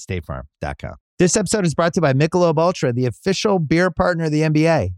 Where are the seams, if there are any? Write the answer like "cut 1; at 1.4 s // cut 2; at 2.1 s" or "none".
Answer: cut 1; at 1.0 s